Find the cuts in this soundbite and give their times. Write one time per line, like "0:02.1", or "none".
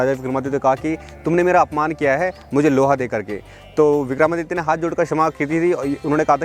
none